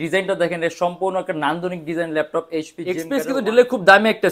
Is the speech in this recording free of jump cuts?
no; 1 cut; at 3.0 s

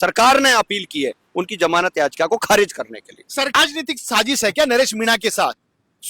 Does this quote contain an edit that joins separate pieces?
yes; 1 cut; at 3.5 s

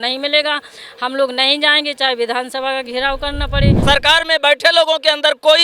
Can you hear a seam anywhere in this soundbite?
yes; 1 cut; at 3.8 s

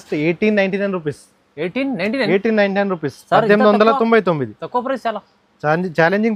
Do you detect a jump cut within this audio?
no; 0 cuts

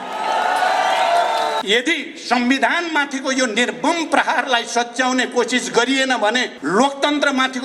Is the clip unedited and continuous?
no; 2 cuts; at 1.6 s, 6.5 s

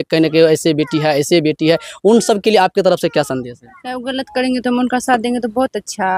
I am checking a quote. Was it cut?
no; 0 cuts

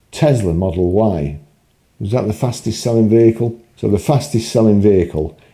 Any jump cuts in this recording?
yes; 1 cut; at 3.6 s

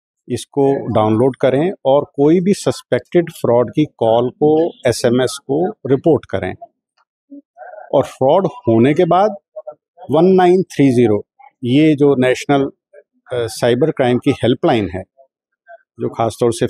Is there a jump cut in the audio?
no; 0 cuts

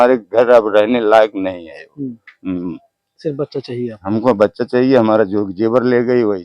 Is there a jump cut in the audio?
no; 0 cuts

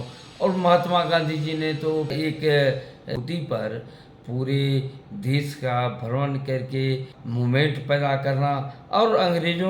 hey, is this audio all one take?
no; 3 cuts; at 2.1 s, 3.1 s, 7.2 s

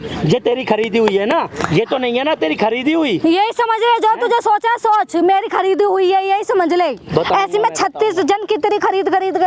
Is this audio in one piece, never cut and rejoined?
yes; 0 cuts

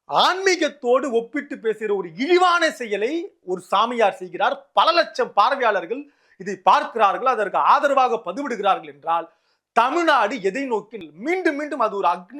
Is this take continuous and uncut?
no; 1 cut; at 10.9 s

